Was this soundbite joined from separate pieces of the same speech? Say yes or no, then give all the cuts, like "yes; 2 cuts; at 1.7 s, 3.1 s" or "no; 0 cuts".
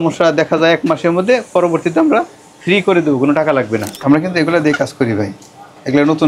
yes; 1 cut; at 4.0 s